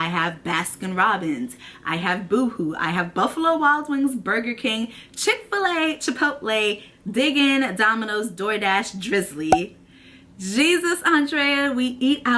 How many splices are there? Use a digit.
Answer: 0